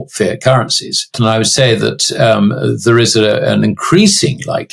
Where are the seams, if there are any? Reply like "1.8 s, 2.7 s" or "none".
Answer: 1.2 s